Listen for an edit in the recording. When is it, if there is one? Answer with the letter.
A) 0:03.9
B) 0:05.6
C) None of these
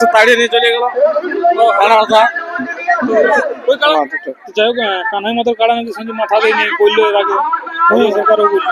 A